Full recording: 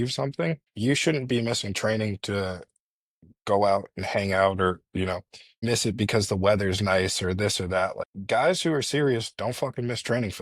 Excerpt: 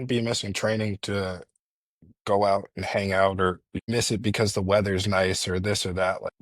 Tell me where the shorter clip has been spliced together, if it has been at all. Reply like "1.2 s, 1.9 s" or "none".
3.7 s